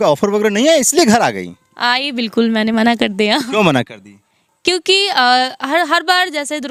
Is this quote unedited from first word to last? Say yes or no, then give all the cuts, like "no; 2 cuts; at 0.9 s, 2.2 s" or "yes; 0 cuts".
yes; 0 cuts